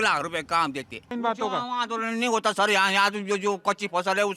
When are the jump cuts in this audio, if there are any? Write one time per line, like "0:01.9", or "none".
0:01.1